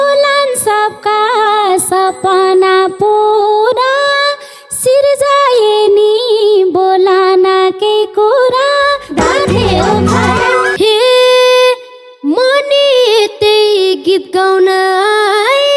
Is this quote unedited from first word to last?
no; 1 cut; at 10.7 s

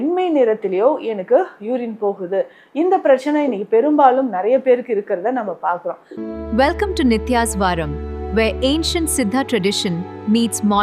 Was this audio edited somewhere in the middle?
yes; 1 cut; at 6.2 s

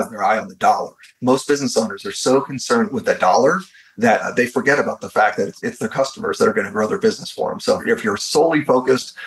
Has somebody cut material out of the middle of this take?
no; 0 cuts

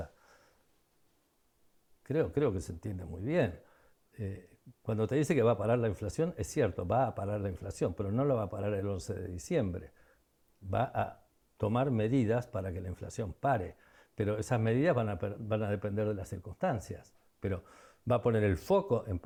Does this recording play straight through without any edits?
yes; 0 cuts

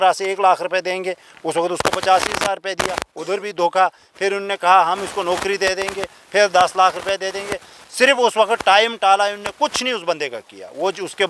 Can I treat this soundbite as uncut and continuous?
yes; 0 cuts

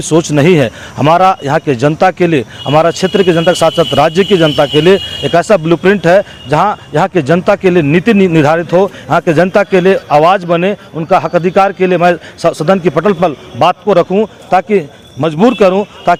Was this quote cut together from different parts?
no; 0 cuts

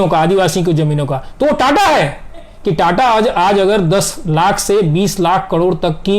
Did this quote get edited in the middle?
yes; 1 cut; at 2.5 s

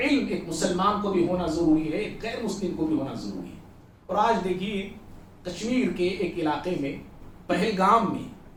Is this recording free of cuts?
yes; 0 cuts

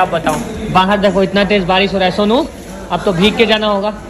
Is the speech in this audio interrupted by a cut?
no; 0 cuts

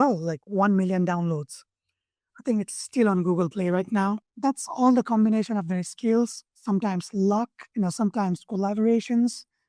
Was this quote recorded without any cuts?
no; 2 cuts; at 4.3 s, 7.6 s

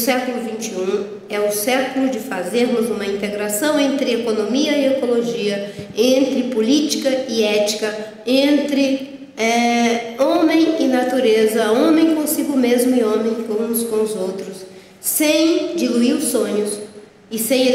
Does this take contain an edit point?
no; 0 cuts

